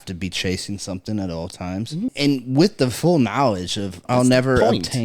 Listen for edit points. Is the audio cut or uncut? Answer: cut